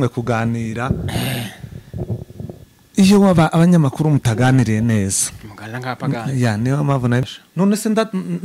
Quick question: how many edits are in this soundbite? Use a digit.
1